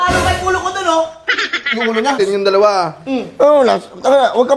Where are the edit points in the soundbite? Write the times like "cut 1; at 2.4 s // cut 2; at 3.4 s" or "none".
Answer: cut 1; at 2.2 s